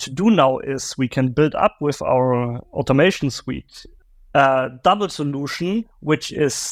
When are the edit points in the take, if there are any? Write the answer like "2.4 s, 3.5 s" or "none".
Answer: none